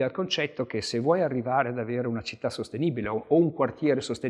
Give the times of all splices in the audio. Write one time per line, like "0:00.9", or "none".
none